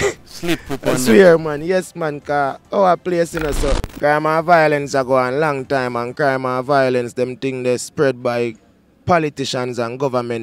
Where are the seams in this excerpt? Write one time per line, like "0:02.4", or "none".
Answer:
0:03.9